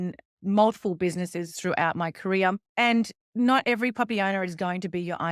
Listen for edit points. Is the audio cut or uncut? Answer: cut